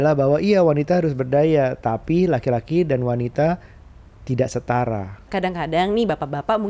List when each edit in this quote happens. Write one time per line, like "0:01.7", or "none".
0:05.2